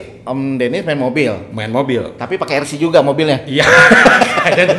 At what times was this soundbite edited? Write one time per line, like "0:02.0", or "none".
none